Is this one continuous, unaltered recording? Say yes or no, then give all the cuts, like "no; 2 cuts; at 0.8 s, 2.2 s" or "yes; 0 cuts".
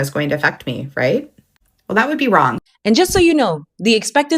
no; 1 cut; at 2.6 s